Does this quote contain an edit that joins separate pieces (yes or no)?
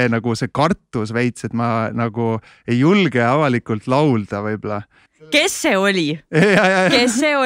yes